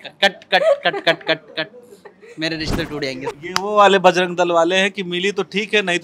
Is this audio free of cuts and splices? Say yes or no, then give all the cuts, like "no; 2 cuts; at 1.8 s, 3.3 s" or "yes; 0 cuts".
no; 1 cut; at 3.4 s